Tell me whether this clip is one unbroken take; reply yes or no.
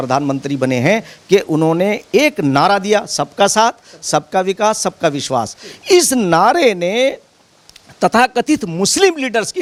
yes